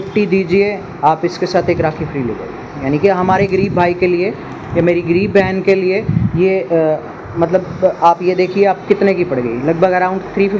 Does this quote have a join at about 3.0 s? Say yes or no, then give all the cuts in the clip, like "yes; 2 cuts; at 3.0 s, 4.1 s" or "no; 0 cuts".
no; 0 cuts